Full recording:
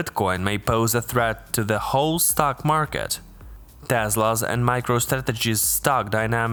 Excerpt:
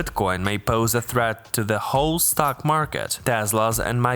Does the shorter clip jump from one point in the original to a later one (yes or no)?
yes